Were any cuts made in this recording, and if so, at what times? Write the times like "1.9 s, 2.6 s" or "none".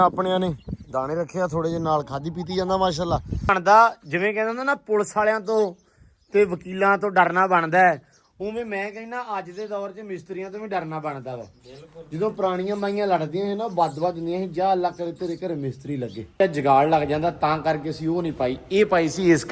3.5 s, 16.4 s